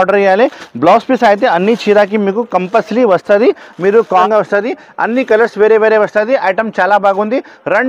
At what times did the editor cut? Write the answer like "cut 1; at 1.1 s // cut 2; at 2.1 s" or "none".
cut 1; at 4.2 s